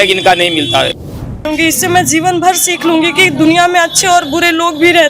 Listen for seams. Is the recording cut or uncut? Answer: cut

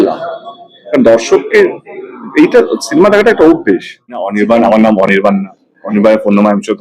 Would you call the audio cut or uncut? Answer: cut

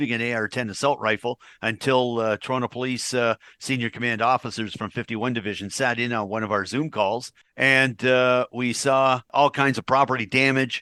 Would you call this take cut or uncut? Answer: uncut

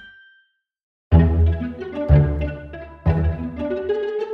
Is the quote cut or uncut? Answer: cut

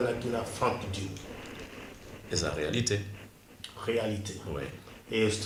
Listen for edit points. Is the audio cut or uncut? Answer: uncut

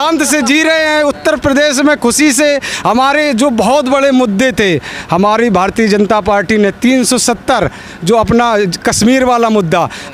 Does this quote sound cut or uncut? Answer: uncut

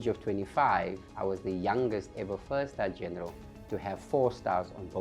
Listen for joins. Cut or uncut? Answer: cut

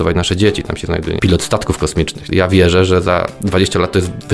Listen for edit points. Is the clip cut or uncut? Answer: cut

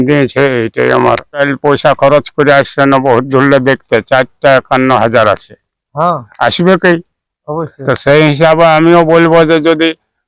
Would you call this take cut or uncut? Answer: cut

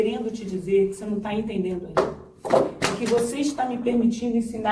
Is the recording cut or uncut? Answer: uncut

